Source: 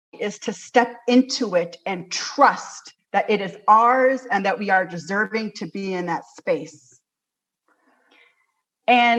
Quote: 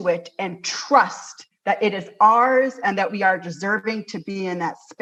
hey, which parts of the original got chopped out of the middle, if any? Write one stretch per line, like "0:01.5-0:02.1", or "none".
none